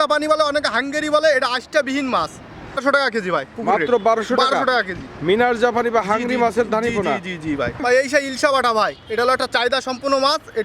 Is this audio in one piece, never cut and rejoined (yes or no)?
no